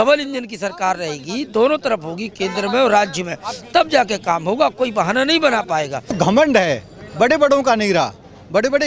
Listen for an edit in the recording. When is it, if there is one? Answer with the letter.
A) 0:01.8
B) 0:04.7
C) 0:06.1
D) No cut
C